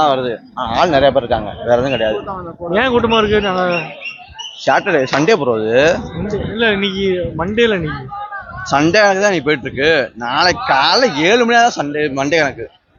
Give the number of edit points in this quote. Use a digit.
0